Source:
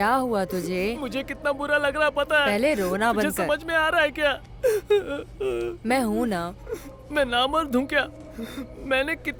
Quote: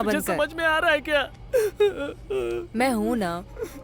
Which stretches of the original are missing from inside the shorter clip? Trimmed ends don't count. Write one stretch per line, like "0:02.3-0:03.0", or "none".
none